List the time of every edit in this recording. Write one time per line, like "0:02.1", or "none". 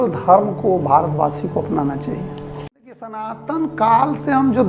0:03.1

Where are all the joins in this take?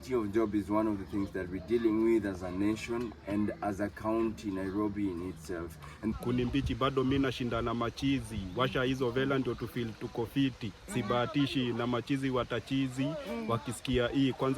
0:06.1

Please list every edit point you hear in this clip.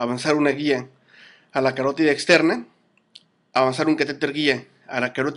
none

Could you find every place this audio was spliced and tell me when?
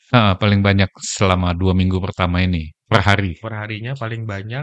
0:02.8

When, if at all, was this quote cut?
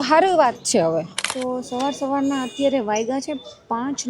0:01.2

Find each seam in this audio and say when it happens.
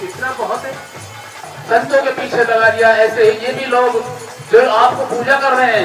0:01.5

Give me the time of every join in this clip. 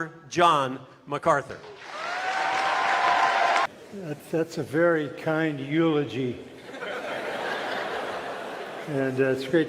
0:03.6

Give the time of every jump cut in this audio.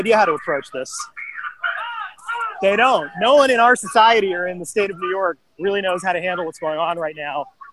none

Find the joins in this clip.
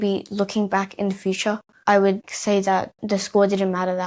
0:01.7
0:02.5

